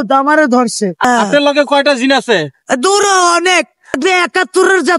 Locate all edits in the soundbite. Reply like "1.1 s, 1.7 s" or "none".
1.0 s, 4.0 s